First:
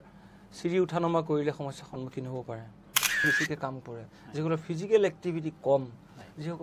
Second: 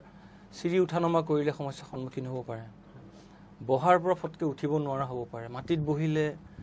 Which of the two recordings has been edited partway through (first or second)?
first